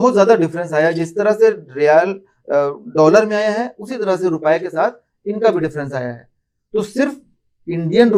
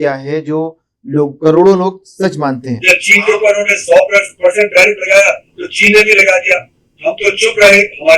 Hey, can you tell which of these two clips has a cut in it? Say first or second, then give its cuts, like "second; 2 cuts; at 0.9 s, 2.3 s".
second; 1 cut; at 2.7 s